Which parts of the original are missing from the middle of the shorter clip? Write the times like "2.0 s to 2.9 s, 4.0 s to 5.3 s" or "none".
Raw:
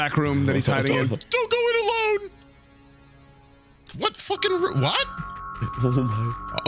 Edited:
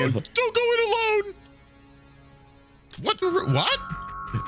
4.2 s to 4.5 s